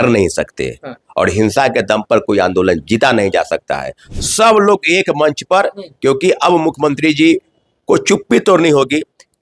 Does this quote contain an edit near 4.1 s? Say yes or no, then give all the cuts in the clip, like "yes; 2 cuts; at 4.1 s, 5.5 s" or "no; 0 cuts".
yes; 1 cut; at 4.1 s